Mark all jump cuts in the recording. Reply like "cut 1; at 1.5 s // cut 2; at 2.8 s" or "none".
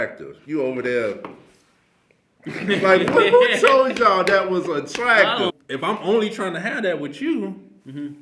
cut 1; at 5.5 s

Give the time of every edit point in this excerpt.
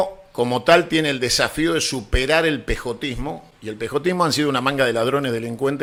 none

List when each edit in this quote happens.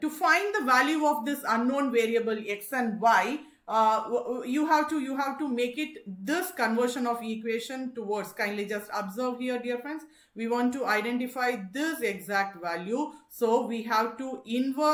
none

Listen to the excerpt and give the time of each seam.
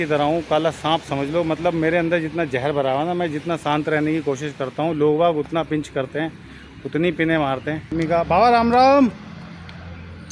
cut 1; at 7.9 s

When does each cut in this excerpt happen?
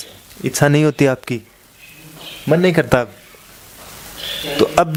none

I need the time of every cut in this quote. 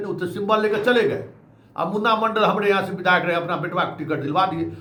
none

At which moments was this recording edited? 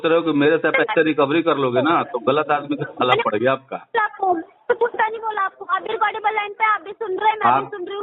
none

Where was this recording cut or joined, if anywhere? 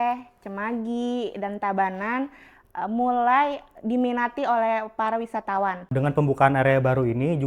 cut 1; at 5.9 s

